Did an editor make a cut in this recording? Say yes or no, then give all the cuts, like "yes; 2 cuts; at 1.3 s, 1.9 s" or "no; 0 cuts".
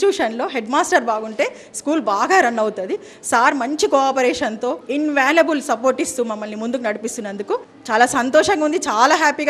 yes; 1 cut; at 4.8 s